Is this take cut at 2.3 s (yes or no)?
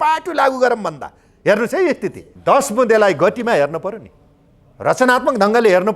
yes